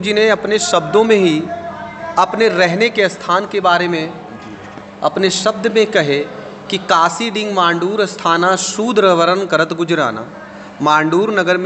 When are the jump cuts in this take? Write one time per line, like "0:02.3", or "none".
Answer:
none